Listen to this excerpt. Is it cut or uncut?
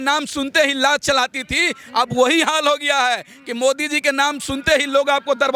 uncut